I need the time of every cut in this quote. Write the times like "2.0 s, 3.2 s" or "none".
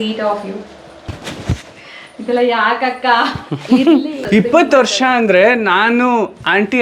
4.2 s

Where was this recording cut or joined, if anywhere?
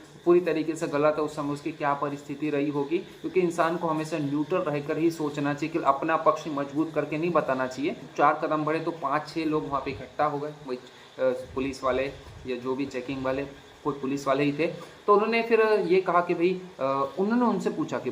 8.1 s

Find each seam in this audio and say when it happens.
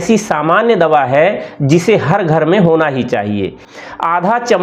3.6 s

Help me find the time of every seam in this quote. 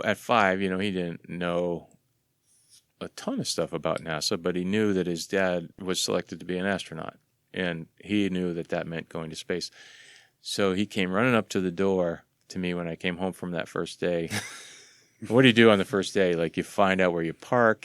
5.8 s

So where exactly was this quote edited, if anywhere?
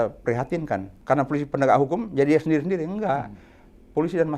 0.9 s

